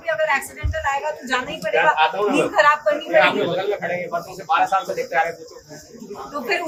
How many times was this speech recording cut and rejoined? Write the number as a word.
zero